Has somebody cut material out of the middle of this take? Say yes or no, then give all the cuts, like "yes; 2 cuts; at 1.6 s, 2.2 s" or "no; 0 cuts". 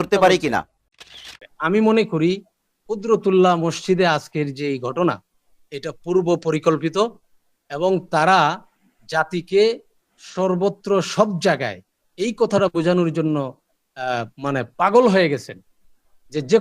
yes; 1 cut; at 1.1 s